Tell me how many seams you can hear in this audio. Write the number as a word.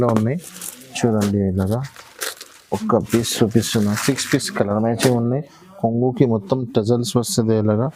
zero